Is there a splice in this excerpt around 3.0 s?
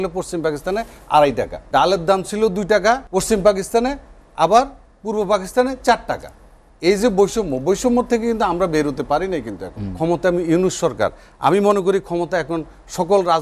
yes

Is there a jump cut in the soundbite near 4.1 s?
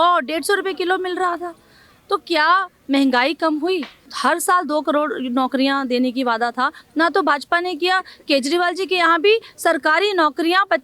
yes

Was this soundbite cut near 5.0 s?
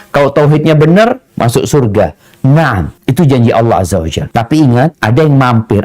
yes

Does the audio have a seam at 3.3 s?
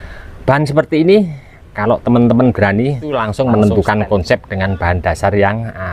yes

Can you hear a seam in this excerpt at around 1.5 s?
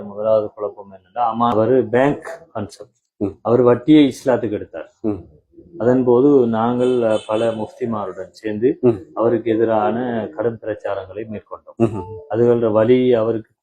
yes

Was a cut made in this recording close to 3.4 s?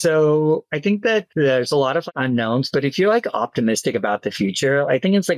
no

